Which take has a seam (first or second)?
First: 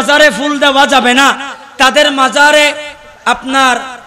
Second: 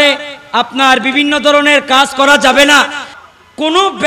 second